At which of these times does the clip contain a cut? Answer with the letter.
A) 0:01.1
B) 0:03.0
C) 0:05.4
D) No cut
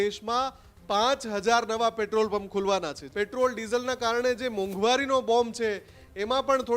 B